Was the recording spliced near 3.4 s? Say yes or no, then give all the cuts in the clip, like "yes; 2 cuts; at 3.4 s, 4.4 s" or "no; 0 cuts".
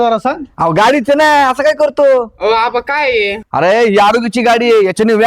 yes; 1 cut; at 3.4 s